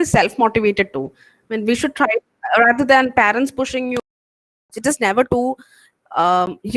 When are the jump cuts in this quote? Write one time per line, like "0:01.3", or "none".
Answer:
0:04.3